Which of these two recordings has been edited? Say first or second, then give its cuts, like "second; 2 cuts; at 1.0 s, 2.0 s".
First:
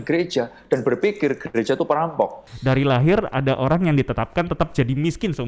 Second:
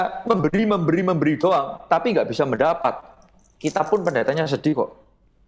first; 1 cut; at 2.5 s